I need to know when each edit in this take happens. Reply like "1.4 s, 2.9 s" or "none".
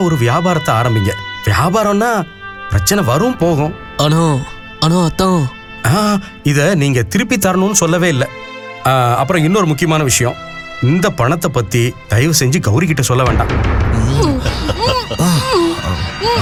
none